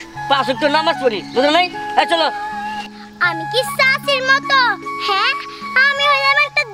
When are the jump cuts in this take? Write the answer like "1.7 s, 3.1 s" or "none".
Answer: 2.9 s